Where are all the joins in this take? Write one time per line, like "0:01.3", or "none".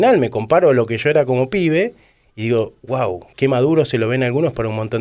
0:03.3

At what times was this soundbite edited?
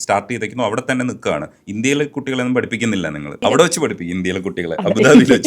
0:03.4

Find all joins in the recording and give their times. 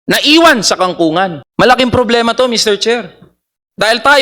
0:01.4

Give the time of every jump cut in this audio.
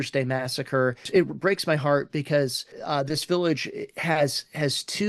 0:01.1
0:02.8

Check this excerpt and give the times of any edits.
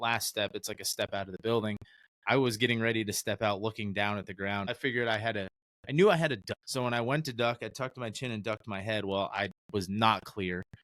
0:04.7
0:06.5

